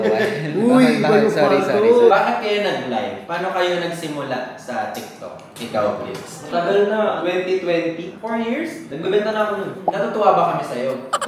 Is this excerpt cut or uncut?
cut